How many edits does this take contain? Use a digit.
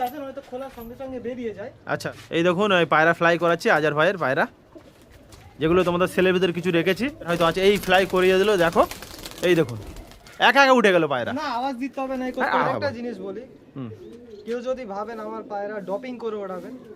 3